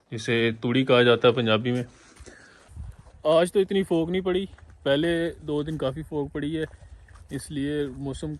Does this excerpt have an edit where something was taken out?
yes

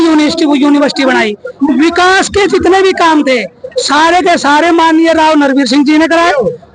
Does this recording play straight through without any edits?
yes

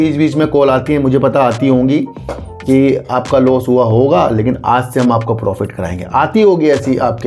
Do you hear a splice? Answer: no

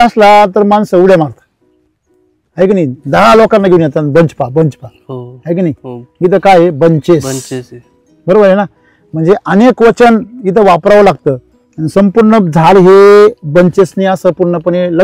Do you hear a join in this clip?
no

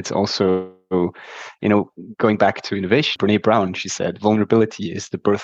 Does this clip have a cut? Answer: yes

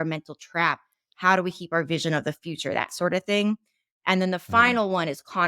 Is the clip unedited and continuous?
no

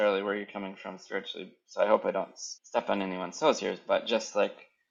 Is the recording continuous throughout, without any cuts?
yes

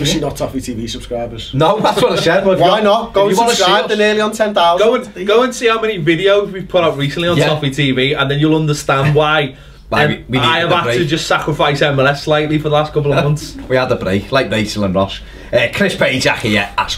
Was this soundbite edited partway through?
yes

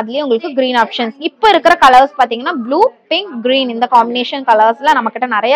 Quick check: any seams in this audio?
no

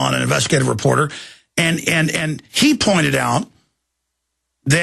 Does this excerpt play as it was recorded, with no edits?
no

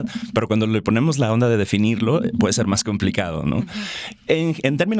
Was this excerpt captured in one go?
yes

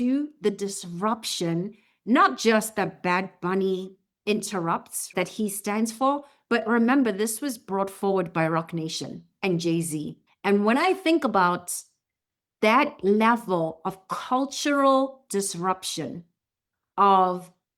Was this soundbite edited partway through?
yes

